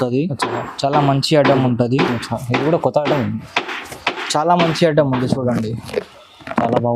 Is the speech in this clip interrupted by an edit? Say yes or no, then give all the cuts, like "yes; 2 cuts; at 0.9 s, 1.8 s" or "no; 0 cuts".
no; 0 cuts